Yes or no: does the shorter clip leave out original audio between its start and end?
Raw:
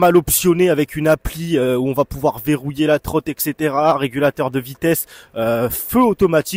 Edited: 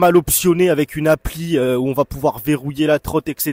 no